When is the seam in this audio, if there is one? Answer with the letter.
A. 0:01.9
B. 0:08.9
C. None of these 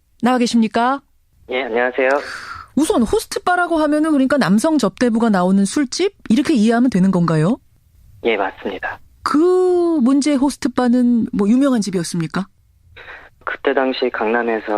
B